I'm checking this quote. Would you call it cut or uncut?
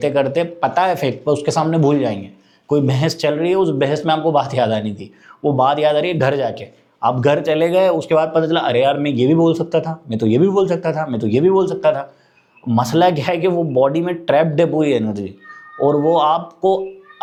uncut